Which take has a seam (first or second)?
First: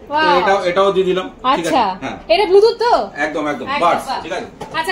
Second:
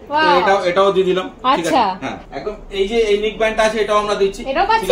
second